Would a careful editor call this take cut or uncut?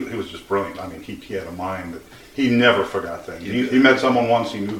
uncut